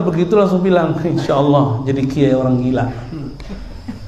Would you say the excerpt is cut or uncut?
uncut